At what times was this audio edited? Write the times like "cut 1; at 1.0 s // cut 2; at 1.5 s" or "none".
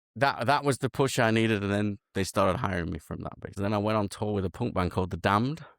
cut 1; at 3.6 s